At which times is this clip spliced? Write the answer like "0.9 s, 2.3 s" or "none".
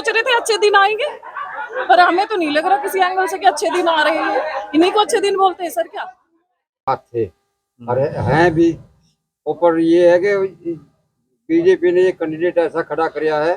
6.8 s